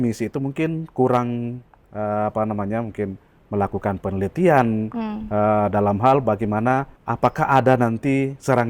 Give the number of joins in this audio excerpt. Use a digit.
1